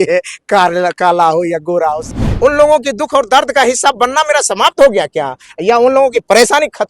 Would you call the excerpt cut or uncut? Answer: cut